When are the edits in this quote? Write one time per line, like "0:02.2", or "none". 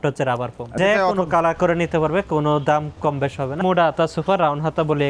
0:00.8
0:03.6

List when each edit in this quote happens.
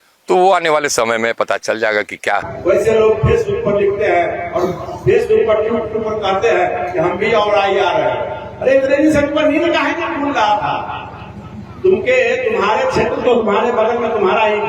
0:02.5

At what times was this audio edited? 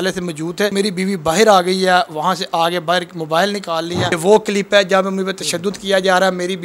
0:00.7
0:04.2

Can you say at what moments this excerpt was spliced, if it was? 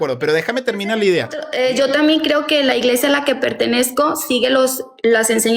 0:01.4

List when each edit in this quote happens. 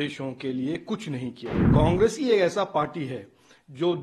0:01.5

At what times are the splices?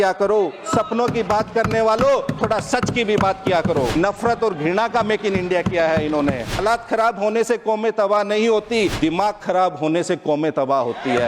0:03.9
0:06.6
0:08.9

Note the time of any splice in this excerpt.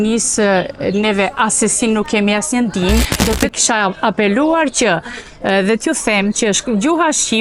0:03.1

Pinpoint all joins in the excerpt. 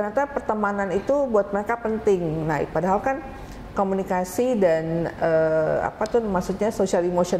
none

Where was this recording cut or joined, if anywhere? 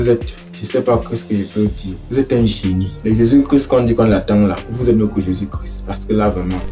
0:01.9
0:02.9

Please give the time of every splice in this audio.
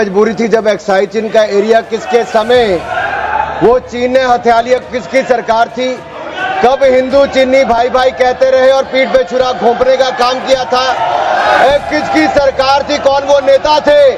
none

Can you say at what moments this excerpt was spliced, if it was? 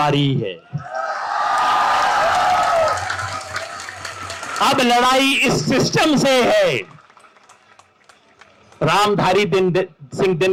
none

